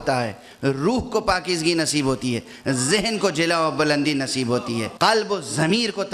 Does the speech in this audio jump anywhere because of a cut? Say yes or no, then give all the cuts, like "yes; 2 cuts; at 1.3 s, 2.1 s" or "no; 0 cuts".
yes; 1 cut; at 4.9 s